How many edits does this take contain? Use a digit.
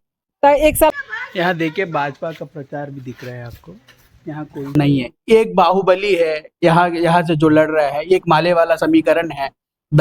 2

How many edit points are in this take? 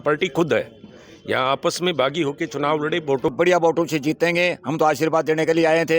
1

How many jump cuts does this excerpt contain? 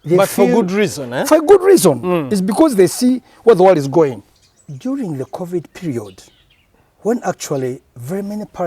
1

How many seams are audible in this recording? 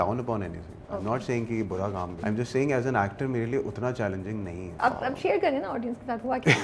2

